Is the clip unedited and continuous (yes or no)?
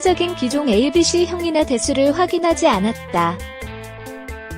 yes